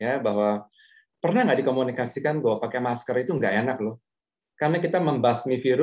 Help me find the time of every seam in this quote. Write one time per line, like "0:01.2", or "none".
0:04.4

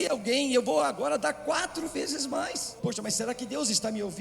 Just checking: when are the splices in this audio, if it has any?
0:02.7

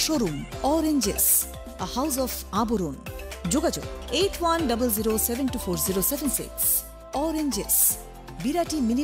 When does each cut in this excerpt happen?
none

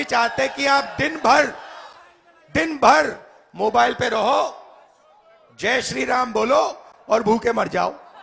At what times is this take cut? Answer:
none

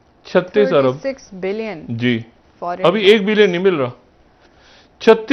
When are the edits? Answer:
none

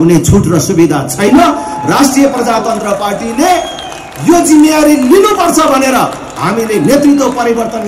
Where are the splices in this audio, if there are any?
none

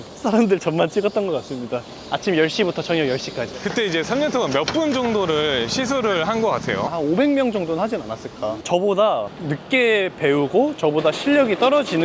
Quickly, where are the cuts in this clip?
0:08.6

